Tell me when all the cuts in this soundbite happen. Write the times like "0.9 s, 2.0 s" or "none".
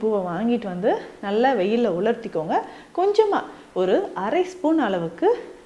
none

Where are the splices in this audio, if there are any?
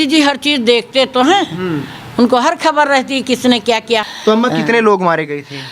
4.1 s

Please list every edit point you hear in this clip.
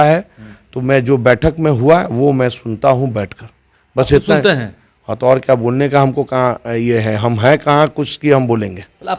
none

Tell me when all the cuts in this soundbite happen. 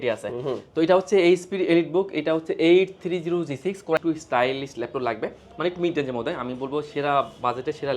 4.0 s

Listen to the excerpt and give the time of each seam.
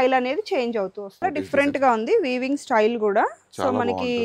1.3 s

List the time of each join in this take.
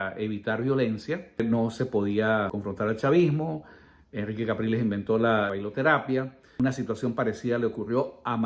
1.4 s, 2.5 s, 5.5 s, 6.6 s

